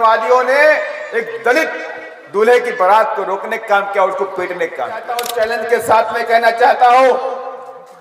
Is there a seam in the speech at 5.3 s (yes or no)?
yes